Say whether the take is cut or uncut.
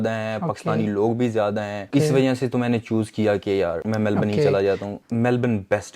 cut